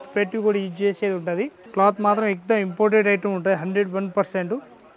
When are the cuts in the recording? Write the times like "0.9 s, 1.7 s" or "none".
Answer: 1.6 s